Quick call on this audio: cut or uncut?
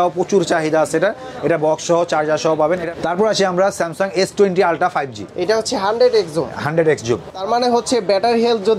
cut